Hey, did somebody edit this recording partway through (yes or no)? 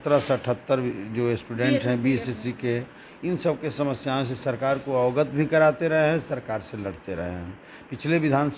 no